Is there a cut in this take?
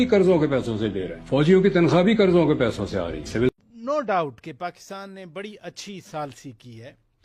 yes; 1 cut; at 3.5 s

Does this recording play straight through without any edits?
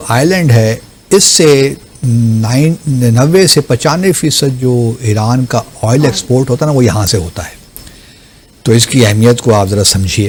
yes; 0 cuts

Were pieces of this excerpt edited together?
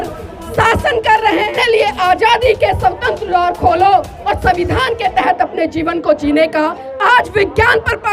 yes; 2 cuts; at 1.5 s, 6.8 s

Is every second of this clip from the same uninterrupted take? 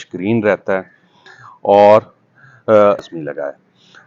no; 1 cut; at 3.1 s

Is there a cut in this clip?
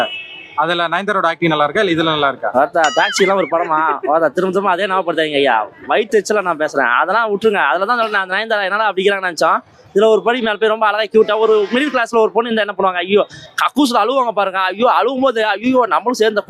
no; 0 cuts

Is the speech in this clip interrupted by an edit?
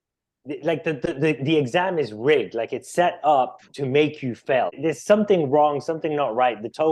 yes; 1 cut; at 4.7 s

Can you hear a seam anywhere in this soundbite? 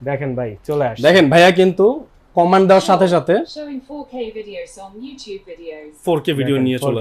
no; 0 cuts

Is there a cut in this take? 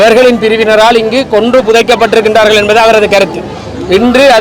no; 0 cuts

